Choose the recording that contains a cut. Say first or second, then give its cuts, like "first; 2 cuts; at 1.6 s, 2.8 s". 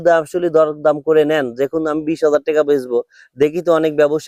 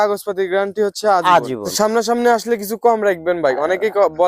second; 1 cut; at 1.7 s